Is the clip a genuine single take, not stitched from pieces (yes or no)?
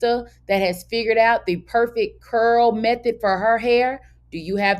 yes